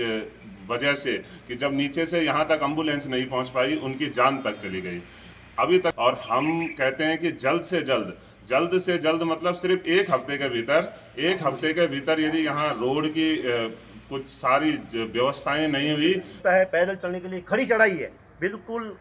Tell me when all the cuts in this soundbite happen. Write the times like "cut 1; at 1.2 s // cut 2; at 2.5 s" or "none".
cut 1; at 6.0 s // cut 2; at 16.2 s